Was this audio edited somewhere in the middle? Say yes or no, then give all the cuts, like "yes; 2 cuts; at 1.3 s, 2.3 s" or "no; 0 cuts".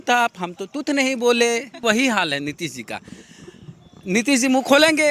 yes; 1 cut; at 1.8 s